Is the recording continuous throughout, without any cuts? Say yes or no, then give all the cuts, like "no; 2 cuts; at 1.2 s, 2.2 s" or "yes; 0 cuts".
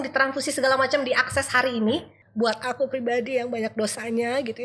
no; 1 cut; at 2.2 s